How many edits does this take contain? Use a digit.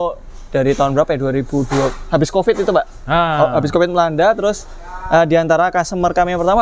0